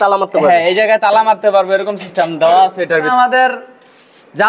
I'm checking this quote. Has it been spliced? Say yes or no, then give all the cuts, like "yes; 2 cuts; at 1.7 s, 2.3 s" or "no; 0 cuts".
yes; 1 cut; at 3.1 s